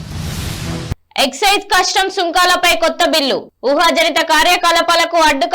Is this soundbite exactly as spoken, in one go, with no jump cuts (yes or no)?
no